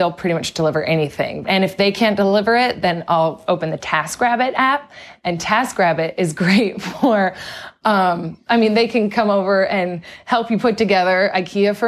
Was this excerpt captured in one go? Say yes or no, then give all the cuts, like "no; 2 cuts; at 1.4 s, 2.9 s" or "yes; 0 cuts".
no; 1 cut; at 1.4 s